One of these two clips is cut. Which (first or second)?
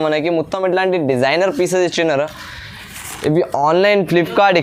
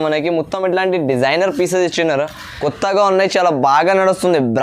second